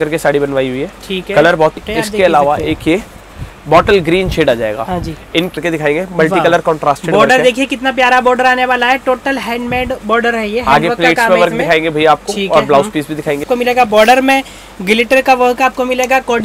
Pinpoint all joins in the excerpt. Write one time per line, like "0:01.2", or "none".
0:01.7
0:05.6
0:13.4